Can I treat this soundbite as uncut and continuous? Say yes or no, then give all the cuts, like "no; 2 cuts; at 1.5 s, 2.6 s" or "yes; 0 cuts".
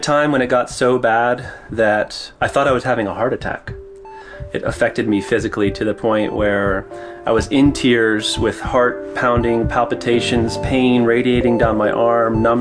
yes; 0 cuts